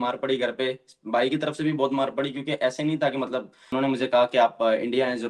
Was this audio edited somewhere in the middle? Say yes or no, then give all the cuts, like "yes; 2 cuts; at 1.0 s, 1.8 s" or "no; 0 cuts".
yes; 1 cut; at 3.6 s